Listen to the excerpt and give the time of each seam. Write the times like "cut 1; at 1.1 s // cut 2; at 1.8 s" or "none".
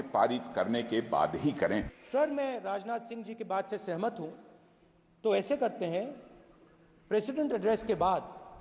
cut 1; at 2.0 s